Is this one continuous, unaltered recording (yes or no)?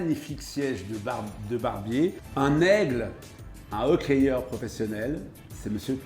no